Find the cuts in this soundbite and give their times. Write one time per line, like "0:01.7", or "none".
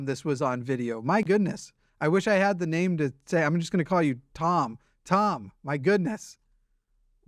none